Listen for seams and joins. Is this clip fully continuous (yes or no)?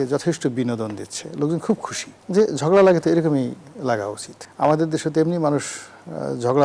yes